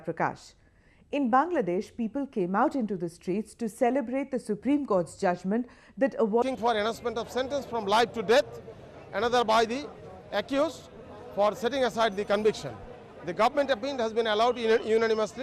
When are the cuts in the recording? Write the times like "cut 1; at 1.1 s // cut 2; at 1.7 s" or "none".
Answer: none